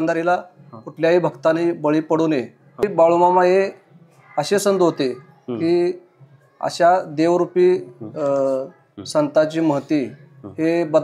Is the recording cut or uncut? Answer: cut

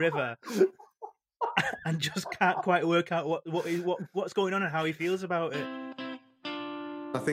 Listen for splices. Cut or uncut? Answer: cut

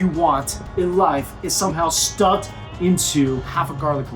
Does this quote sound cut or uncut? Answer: uncut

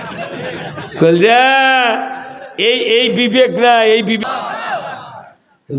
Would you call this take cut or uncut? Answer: cut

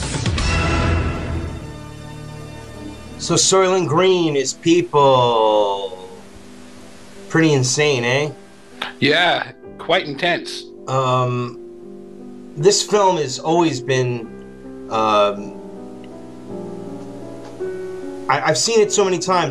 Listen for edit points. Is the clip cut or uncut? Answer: cut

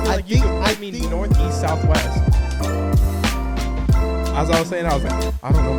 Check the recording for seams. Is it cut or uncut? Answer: uncut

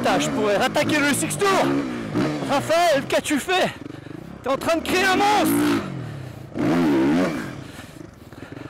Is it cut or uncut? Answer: uncut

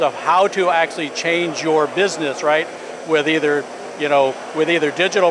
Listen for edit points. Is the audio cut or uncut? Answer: uncut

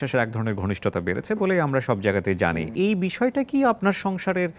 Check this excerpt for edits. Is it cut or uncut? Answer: cut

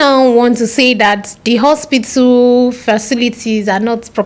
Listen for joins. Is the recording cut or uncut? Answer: uncut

